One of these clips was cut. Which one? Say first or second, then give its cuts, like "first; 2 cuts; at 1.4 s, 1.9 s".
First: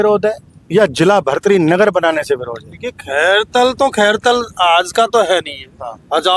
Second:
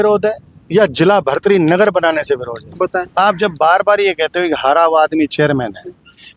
second; 1 cut; at 2.6 s